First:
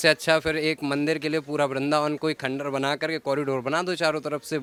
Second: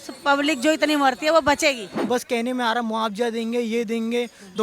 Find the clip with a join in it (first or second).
second